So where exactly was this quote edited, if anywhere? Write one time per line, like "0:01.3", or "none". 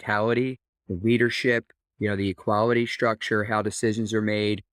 none